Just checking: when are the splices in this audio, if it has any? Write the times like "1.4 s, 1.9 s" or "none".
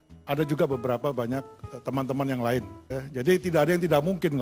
2.8 s

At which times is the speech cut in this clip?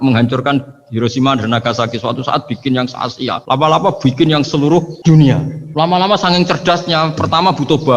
3.4 s, 4.9 s, 5.6 s

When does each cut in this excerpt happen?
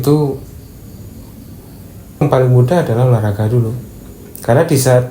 2.2 s

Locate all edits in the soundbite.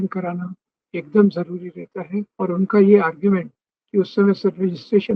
2.3 s

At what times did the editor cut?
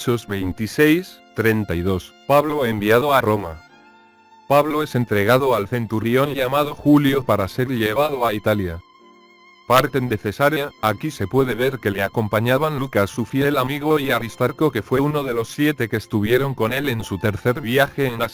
4.2 s

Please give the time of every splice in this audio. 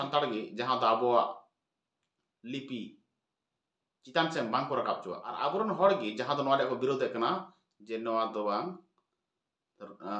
5.2 s

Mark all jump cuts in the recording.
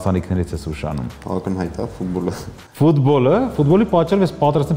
1.1 s

